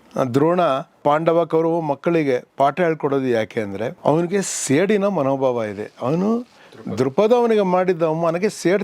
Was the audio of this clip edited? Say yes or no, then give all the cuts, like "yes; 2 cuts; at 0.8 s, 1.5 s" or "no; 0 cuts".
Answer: yes; 2 cuts; at 1.0 s, 3.9 s